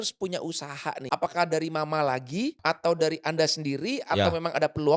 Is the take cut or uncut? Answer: cut